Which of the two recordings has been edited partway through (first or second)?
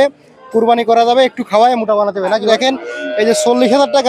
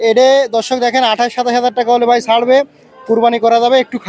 first